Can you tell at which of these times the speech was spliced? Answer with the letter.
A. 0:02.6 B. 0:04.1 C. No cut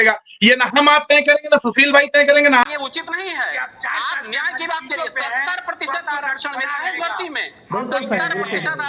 A